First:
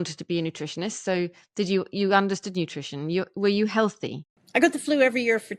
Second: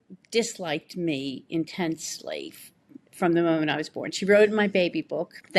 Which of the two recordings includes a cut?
first; 1 cut; at 4.3 s

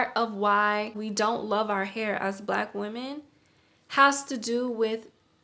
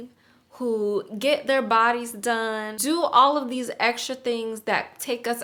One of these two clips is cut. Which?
first; 1 cut; at 1.0 s

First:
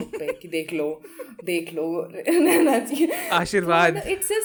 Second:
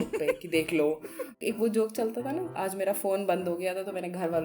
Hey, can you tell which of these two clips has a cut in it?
second; 2 cuts; at 1.4 s, 2.5 s

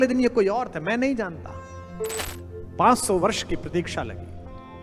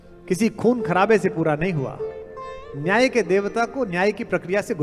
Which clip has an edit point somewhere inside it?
first; 1 cut; at 2.2 s

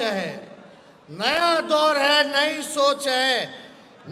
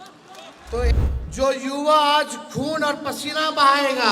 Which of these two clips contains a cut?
second; 1 cut; at 0.9 s

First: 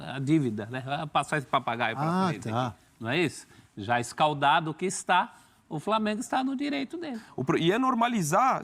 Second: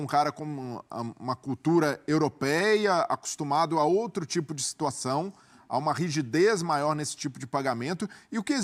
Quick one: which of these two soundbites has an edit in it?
first; 1 cut; at 7.2 s

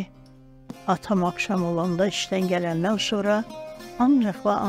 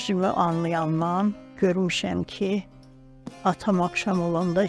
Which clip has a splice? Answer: second; 1 cut; at 1.5 s

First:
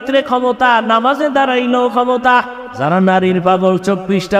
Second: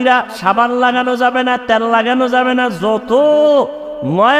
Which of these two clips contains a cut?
first; 1 cut; at 2.6 s

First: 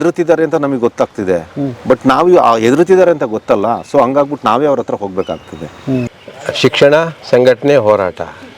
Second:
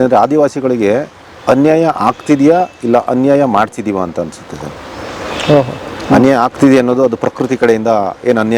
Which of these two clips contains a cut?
first; 1 cut; at 6.2 s

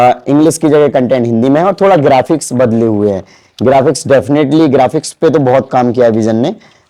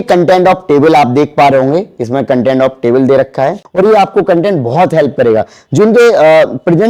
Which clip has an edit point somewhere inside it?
second; 1 cut; at 3.6 s

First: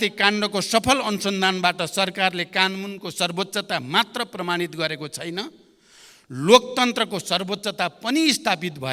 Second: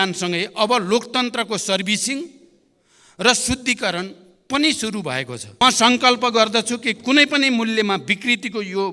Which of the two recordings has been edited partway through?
second; 1 cut; at 5.6 s

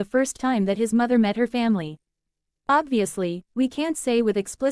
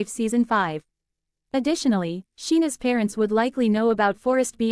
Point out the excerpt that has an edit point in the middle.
second; 1 cut; at 1.3 s

